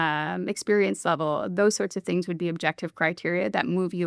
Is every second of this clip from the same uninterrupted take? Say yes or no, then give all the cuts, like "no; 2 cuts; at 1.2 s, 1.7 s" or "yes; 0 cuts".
yes; 0 cuts